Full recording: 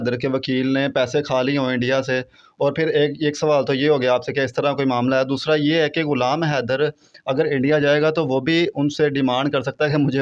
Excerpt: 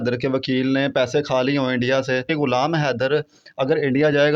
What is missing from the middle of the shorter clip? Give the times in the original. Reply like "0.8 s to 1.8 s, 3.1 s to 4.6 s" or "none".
2.3 s to 6.0 s

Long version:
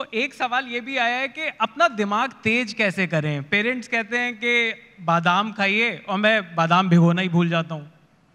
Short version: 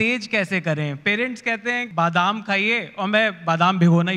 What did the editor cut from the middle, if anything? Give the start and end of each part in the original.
4.3 s to 5.0 s

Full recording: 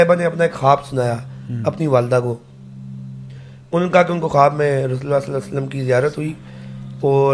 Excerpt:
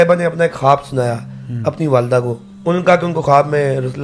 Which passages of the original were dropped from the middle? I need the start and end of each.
2.5 s to 3.5 s

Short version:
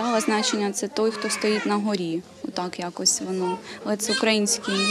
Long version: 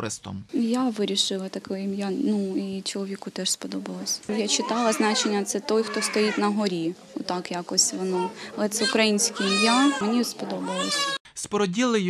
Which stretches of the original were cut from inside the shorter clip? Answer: none

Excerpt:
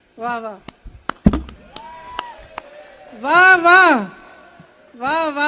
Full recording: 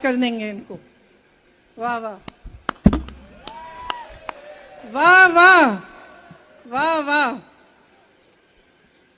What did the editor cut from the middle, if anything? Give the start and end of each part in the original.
3.2 s to 3.3 s

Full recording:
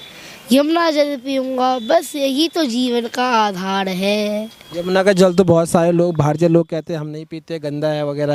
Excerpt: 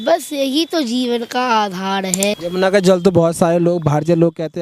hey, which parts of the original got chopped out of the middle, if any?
4.2 s to 4.7 s

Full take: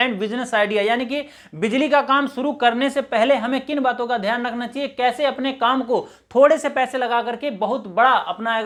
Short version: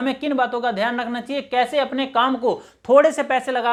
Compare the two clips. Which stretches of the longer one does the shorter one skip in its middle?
none

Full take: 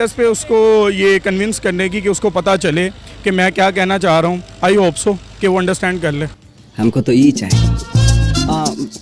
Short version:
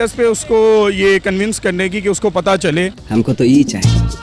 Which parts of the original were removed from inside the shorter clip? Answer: 3.0 s to 6.7 s

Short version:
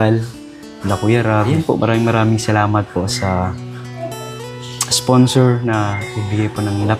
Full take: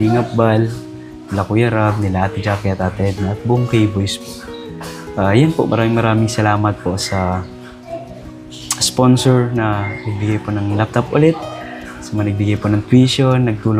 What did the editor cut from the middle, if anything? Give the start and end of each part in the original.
2.0 s to 5.4 s

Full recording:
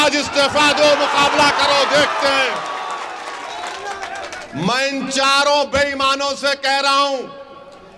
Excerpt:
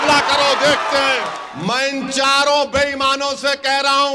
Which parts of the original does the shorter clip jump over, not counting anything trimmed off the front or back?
2.7 s to 4.4 s

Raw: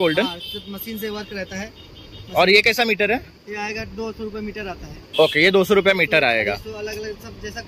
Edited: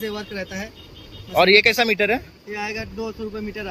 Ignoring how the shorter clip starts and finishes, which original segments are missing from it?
none

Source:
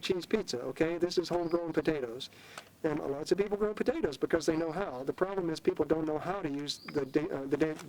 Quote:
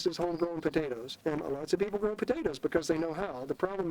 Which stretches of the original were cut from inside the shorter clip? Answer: 2.2 s to 2.7 s

